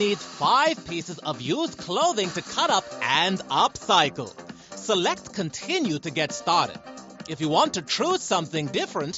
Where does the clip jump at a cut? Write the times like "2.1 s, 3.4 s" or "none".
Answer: none